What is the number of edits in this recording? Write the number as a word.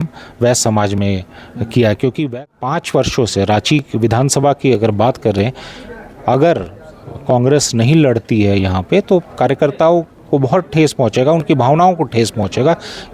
one